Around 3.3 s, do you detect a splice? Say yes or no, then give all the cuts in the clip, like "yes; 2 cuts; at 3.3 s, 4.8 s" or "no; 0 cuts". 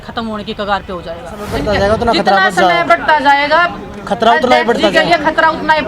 no; 1 cut; at 1.5 s